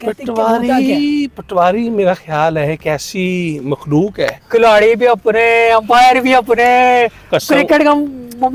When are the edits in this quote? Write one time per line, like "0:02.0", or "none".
0:04.4